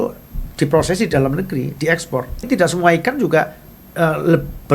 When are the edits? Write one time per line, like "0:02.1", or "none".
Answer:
0:02.4

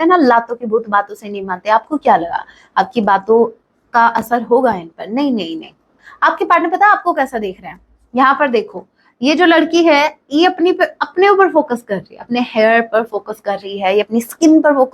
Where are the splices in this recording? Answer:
0:06.1

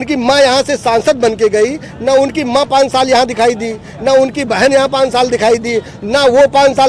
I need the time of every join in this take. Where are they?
none

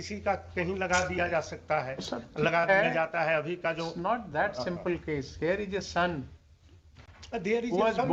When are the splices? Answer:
none

